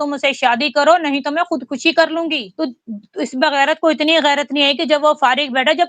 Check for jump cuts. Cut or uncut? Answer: cut